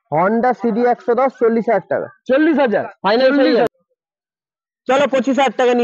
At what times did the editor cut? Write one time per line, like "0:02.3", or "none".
0:03.7